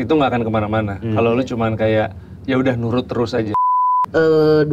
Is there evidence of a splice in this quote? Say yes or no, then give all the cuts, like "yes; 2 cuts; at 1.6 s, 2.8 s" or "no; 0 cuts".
yes; 1 cut; at 3.5 s